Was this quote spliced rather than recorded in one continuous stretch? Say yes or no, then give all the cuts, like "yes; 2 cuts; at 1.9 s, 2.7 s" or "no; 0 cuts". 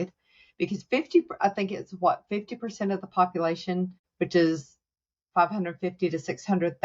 yes; 1 cut; at 4.0 s